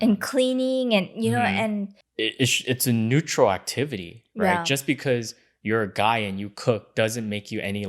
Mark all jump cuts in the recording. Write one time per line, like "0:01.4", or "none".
0:02.0